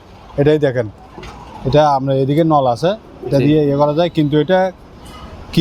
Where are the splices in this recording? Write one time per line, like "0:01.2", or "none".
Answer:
none

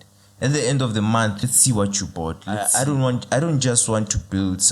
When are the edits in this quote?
0:01.4
0:02.6

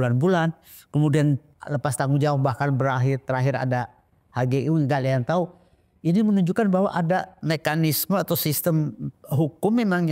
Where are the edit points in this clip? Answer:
0:01.5
0:07.4

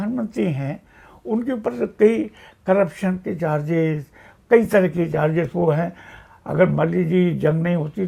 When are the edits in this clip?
none

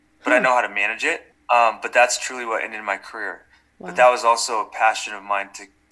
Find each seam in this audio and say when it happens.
0:01.2

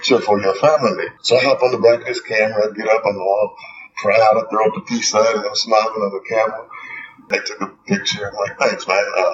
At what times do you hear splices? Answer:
0:01.1
0:07.3

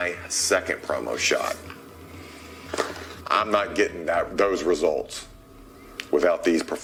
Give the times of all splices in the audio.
none

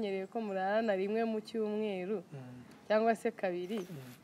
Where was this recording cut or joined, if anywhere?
none

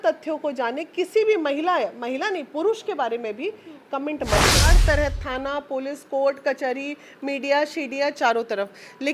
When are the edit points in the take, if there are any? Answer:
0:04.7

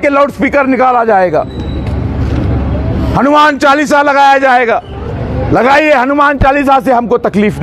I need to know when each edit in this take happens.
none

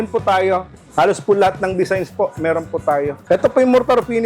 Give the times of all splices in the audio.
0:03.2

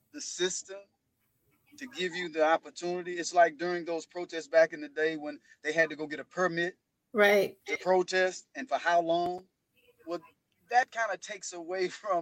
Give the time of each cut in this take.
none

